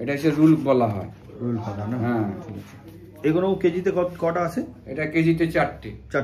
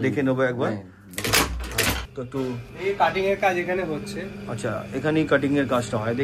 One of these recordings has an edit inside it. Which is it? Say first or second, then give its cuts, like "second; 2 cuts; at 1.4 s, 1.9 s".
second; 1 cut; at 2.1 s